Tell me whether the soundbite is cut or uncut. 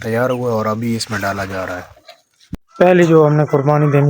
cut